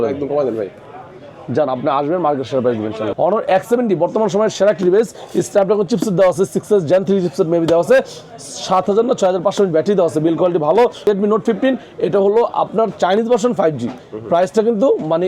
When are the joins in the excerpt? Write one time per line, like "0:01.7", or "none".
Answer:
0:03.0
0:11.0